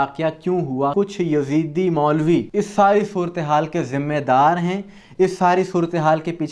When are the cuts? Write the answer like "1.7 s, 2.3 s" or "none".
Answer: 0.9 s, 2.5 s